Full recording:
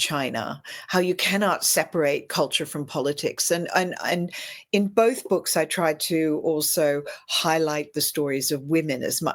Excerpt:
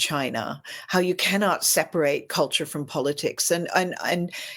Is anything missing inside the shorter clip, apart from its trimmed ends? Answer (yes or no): no